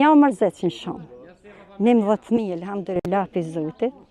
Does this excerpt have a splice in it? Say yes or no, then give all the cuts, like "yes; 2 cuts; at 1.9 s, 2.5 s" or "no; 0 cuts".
no; 0 cuts